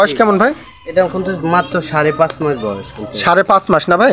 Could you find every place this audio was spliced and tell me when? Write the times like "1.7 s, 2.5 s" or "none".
none